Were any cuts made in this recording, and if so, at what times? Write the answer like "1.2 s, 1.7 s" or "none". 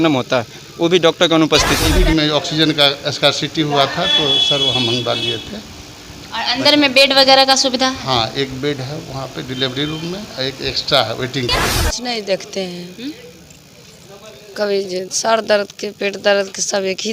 1.9 s, 11.8 s

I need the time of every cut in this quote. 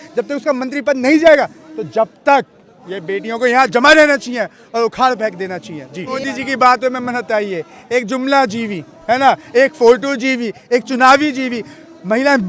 6.2 s

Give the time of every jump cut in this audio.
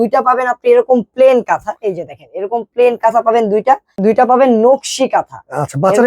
3.9 s

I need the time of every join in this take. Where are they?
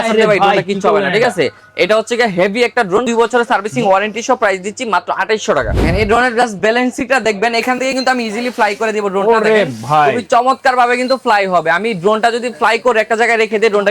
3.1 s, 5.8 s

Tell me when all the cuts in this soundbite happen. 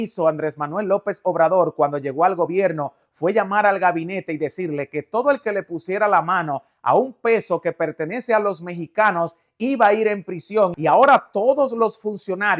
10.8 s

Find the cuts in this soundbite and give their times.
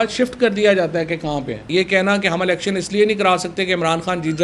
1.6 s

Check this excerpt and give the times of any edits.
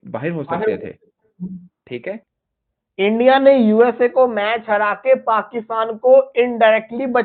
2.3 s

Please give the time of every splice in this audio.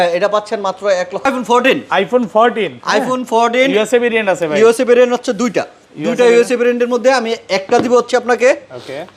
1.3 s

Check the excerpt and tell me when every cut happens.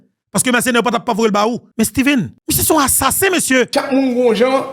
3.7 s

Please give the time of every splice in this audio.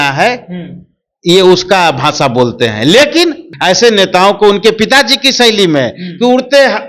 3.4 s

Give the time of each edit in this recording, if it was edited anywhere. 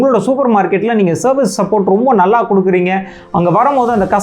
none

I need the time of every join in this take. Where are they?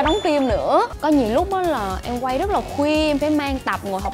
0.9 s

